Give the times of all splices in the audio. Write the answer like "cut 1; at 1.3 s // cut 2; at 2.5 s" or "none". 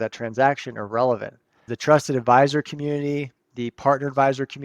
cut 1; at 1.7 s